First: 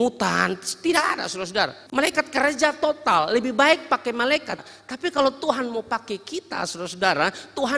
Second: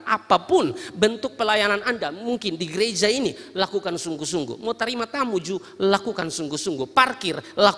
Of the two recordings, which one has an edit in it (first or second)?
first